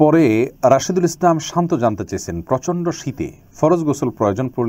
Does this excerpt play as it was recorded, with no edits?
yes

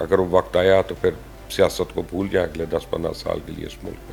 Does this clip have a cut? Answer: no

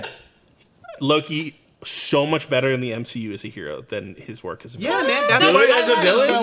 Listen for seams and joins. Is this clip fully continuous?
yes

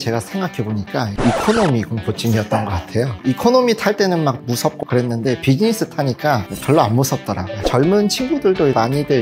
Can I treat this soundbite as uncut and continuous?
no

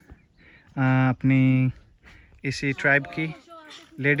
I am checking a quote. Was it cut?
no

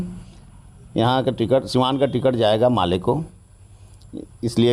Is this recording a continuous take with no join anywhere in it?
yes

